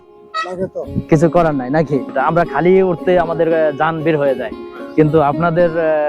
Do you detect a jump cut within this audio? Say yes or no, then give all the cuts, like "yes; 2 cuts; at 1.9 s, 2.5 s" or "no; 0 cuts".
yes; 2 cuts; at 0.9 s, 2.1 s